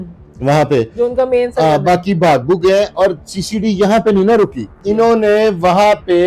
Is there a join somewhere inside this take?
yes; 1 cut; at 4.7 s

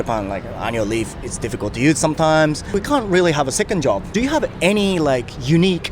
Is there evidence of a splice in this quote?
yes; 1 cut; at 4.0 s

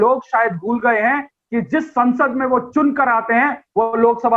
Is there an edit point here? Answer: no; 0 cuts

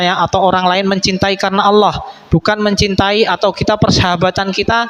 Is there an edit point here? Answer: no; 0 cuts

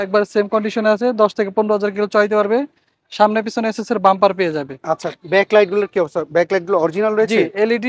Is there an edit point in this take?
no; 0 cuts

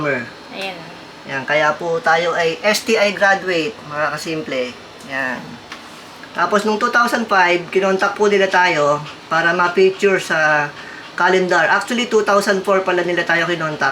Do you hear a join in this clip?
no; 0 cuts

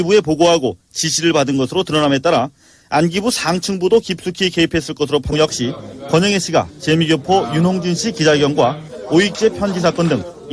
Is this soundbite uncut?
yes; 0 cuts

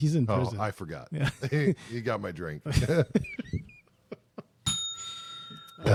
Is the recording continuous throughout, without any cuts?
yes; 0 cuts

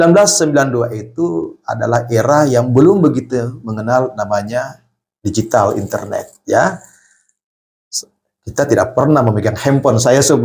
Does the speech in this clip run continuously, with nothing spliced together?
yes; 0 cuts

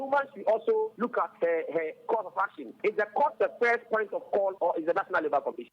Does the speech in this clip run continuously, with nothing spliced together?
no; 3 cuts; at 0.9 s, 2.7 s, 4.6 s

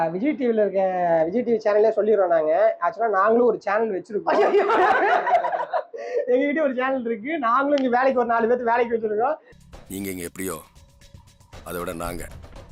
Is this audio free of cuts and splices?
yes; 0 cuts

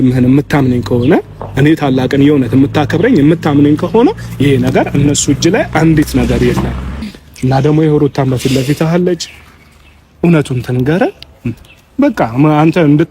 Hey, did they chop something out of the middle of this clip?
yes; 1 cut; at 7.0 s

